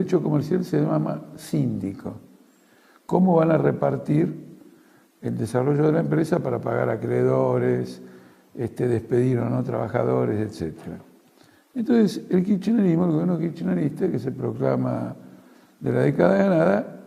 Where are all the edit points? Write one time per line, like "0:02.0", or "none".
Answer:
0:15.9

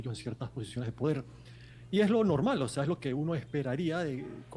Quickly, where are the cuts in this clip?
none

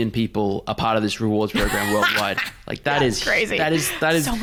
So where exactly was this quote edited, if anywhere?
none

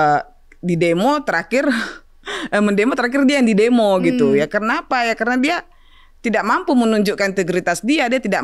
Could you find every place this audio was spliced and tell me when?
none

